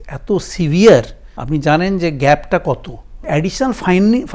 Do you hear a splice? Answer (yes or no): yes